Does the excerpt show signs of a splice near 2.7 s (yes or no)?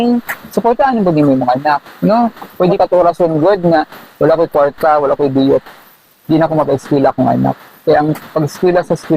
yes